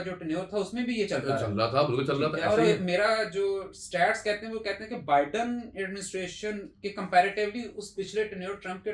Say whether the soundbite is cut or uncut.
uncut